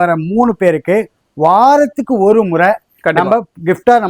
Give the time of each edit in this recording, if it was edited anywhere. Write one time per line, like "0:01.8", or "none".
none